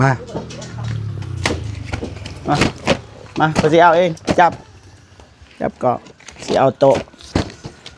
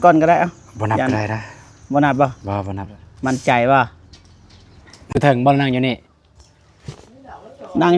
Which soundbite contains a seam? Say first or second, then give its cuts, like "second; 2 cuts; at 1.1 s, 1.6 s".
second; 1 cut; at 5.1 s